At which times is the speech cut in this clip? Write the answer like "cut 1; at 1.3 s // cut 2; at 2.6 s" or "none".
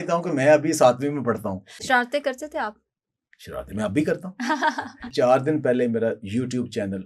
cut 1; at 1.8 s // cut 2; at 5.1 s